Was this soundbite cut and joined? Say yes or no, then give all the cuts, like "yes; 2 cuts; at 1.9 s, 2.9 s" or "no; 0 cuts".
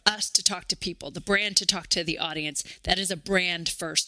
no; 0 cuts